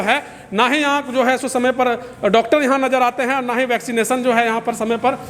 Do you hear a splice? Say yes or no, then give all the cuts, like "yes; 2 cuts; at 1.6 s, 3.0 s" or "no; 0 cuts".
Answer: no; 0 cuts